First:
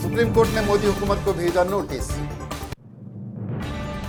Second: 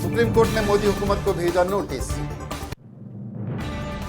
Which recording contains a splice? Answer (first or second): second